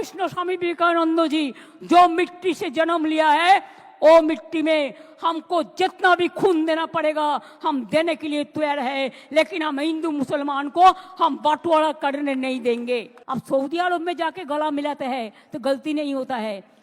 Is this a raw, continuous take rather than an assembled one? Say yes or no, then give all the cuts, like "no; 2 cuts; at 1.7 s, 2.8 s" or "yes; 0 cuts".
no; 1 cut; at 13.2 s